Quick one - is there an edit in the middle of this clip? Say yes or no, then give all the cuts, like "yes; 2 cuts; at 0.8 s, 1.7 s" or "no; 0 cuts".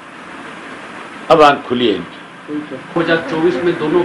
yes; 1 cut; at 2.8 s